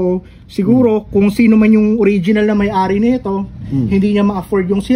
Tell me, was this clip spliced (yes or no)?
no